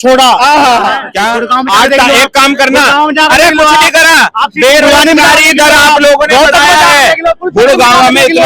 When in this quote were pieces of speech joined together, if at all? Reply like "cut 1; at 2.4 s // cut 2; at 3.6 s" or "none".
cut 1; at 1.1 s